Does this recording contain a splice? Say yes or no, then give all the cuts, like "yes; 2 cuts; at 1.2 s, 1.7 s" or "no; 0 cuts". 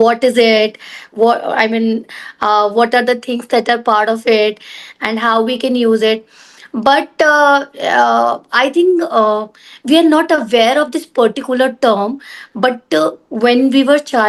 no; 0 cuts